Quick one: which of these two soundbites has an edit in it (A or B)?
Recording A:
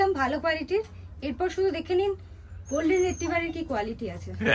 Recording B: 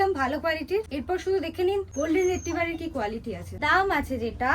B